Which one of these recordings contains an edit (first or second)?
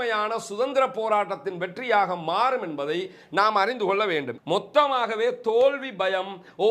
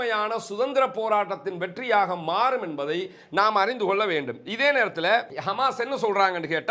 first